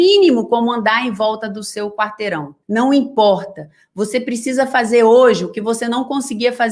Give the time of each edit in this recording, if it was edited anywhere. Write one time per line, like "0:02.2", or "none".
0:02.5